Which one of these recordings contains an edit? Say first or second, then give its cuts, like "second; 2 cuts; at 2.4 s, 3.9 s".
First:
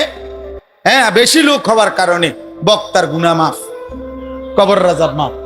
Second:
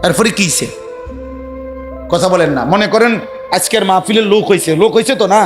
second; 2 cuts; at 0.7 s, 2.1 s